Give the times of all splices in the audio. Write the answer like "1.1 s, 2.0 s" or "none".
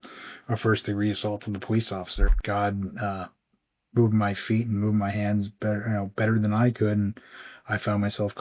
2.3 s